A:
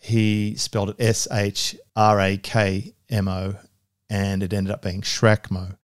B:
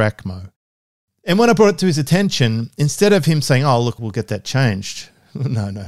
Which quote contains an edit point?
B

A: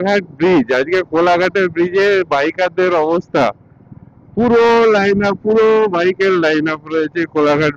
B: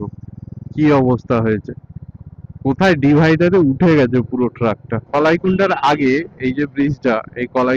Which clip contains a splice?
B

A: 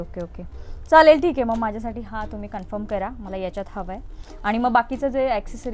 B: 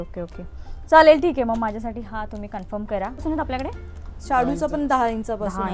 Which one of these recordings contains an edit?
B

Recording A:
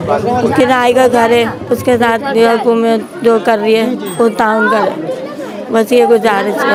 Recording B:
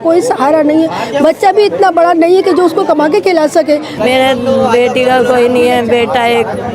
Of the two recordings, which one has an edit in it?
B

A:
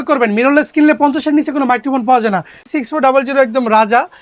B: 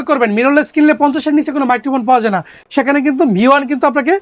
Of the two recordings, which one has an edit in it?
A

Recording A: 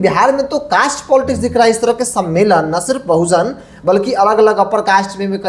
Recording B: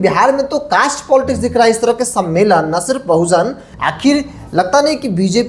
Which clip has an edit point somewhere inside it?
B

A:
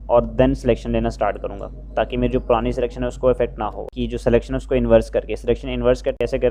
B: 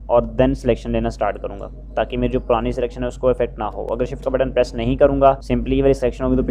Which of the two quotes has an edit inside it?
A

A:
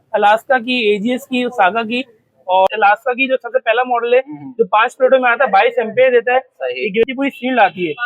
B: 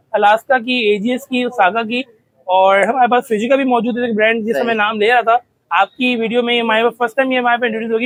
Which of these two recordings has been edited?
A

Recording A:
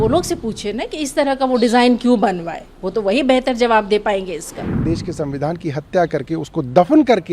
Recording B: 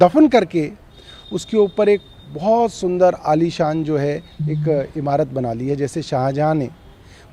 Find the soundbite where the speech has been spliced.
A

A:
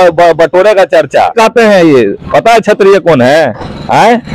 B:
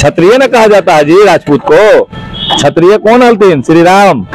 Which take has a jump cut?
A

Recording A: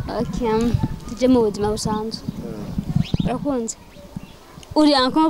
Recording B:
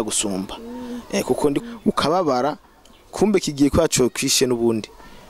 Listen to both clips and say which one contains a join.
B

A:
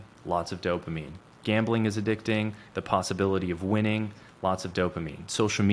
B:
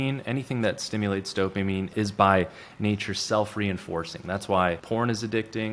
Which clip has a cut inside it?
B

